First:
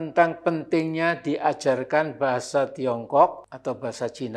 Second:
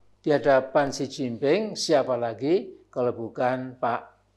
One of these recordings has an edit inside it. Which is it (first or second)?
first